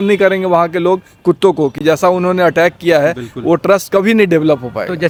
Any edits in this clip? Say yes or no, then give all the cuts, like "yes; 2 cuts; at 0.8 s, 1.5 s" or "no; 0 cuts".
no; 0 cuts